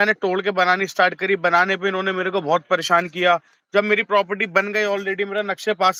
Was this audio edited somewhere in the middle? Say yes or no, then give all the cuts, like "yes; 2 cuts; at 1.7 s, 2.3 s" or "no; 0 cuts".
no; 0 cuts